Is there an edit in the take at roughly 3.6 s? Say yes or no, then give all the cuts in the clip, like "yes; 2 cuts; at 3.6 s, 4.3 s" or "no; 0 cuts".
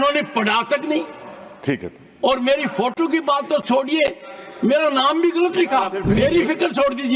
no; 1 cut; at 6.0 s